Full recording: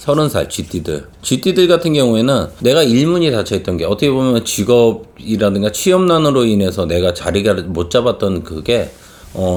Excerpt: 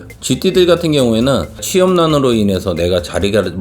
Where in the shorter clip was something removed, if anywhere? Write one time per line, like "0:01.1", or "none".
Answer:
0:01.6